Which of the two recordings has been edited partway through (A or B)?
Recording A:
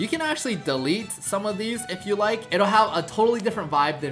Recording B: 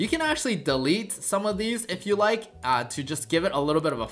A